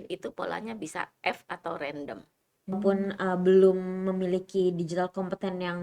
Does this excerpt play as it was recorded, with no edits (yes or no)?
no